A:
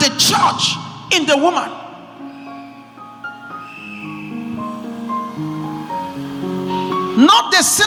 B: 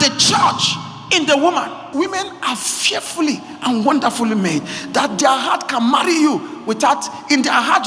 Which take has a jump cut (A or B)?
B